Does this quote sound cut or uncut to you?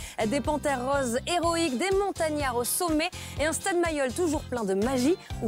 uncut